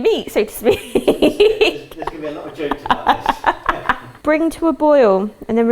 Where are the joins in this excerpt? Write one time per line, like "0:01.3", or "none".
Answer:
0:04.1